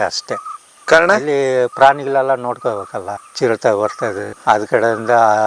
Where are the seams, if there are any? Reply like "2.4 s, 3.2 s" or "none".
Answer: none